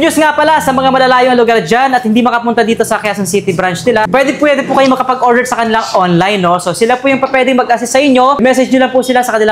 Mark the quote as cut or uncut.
cut